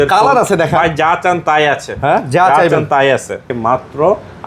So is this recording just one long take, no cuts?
no; 1 cut; at 3.5 s

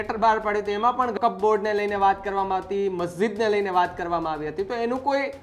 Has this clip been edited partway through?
yes; 1 cut; at 1.1 s

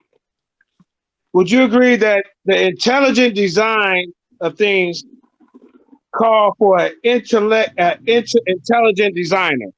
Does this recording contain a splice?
no; 0 cuts

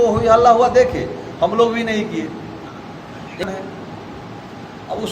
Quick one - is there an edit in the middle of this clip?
yes; 1 cut; at 3.5 s

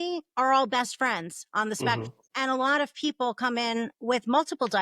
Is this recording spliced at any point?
yes; 1 cut; at 2.2 s

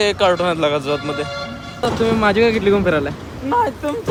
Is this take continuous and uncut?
yes; 0 cuts

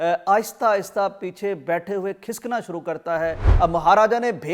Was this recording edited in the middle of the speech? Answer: yes; 1 cut; at 3.5 s

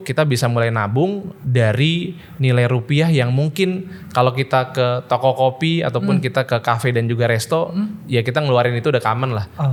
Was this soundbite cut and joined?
no; 0 cuts

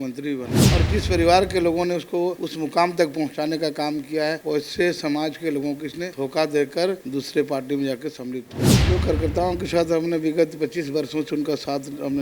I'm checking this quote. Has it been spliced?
yes; 5 cuts; at 2.4 s, 4.4 s, 6.0 s, 7.0 s, 8.8 s

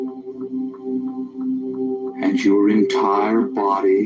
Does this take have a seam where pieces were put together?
yes; 1 cut; at 1.6 s

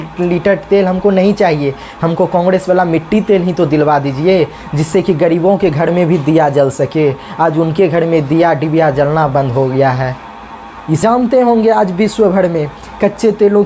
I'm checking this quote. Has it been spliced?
yes; 1 cut; at 11.0 s

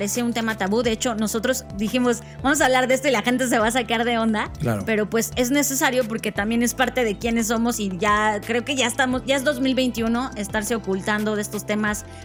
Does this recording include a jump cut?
no; 0 cuts

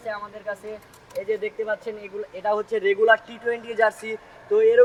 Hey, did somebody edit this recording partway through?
no; 0 cuts

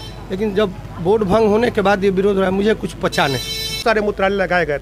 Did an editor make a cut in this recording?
yes; 1 cut; at 3.8 s

